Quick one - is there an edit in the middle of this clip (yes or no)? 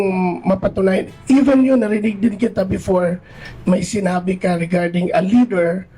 yes